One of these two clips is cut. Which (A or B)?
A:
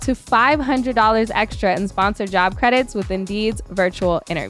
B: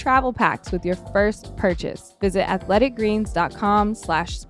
B